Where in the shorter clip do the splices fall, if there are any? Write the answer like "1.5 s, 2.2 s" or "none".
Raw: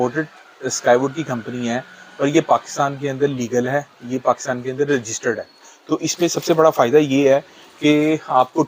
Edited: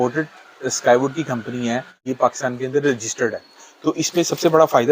2.0 s